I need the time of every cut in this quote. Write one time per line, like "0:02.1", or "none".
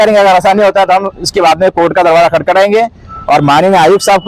none